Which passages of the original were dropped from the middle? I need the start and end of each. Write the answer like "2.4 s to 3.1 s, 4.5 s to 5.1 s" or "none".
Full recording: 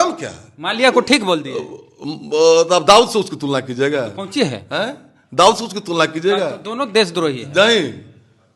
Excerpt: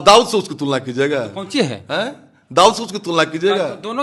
none